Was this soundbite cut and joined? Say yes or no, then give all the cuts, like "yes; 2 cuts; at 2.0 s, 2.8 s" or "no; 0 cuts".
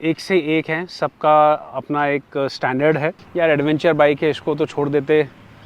yes; 1 cut; at 3.2 s